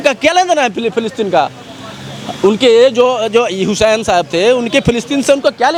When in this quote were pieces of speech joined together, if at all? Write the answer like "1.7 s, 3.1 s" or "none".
none